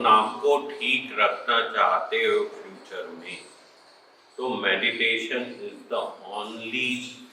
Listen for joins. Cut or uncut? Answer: uncut